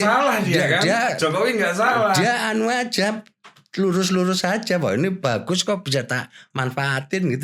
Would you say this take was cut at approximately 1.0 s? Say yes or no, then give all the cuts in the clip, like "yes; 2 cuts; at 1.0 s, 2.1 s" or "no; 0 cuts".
no; 0 cuts